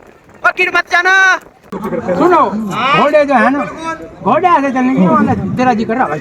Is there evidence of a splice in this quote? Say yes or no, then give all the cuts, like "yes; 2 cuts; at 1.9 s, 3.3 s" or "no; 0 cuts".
yes; 1 cut; at 1.8 s